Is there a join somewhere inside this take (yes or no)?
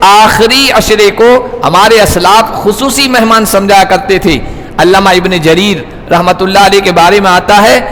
no